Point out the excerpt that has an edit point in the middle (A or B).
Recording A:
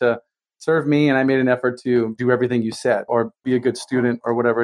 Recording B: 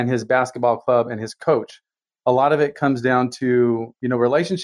A